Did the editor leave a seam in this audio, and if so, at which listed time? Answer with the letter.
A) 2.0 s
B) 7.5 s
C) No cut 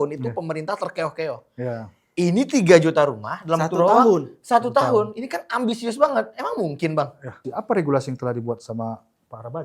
B